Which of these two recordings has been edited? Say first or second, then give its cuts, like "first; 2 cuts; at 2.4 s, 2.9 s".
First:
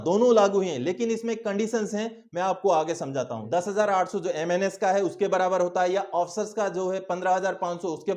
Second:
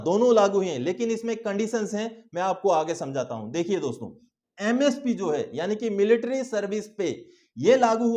first; 1 cut; at 3.4 s